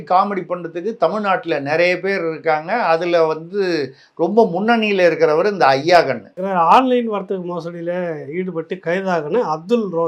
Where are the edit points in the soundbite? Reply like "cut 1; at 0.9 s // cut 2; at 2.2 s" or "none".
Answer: cut 1; at 6.4 s

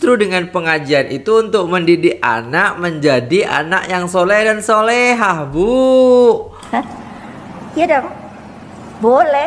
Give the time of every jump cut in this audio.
none

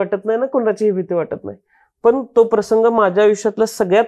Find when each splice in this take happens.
none

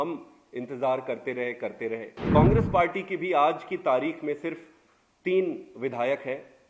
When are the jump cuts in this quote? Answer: cut 1; at 2.1 s

